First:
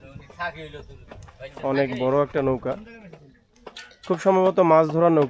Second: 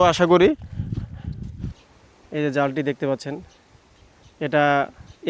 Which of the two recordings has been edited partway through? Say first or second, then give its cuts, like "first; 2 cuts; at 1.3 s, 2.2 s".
second; 1 cut; at 1.7 s